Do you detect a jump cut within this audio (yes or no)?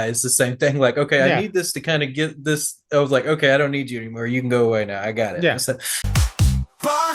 yes